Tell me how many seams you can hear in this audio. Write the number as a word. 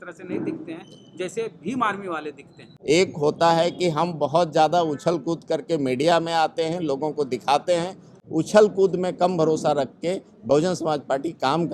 two